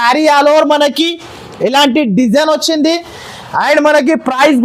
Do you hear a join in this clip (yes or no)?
no